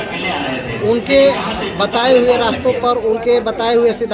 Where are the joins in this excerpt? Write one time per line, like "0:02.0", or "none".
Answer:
none